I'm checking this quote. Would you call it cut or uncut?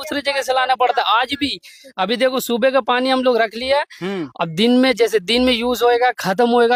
uncut